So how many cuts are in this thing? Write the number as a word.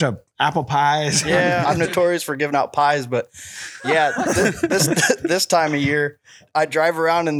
two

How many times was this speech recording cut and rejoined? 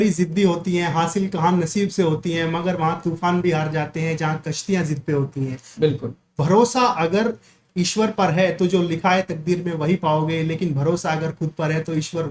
zero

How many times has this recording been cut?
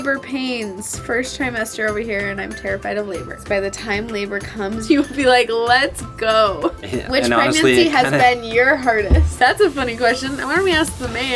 four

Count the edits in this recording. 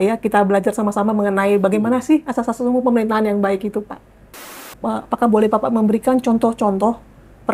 one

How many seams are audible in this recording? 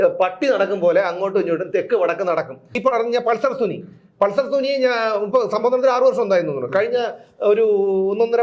one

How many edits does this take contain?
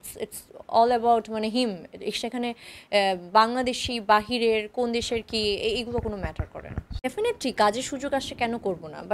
one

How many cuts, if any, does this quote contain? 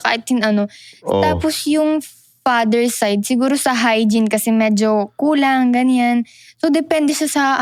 zero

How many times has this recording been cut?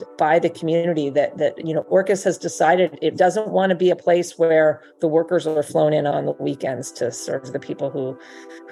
zero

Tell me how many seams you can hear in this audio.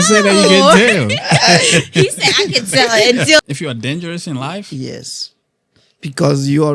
one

